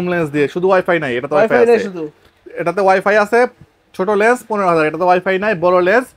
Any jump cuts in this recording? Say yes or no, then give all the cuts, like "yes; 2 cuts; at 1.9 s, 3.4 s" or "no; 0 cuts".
no; 0 cuts